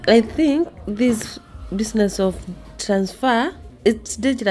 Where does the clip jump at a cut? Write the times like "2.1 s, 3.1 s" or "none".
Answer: none